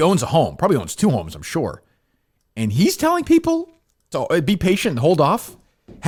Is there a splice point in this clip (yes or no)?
no